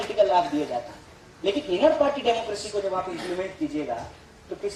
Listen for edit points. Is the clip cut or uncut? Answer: uncut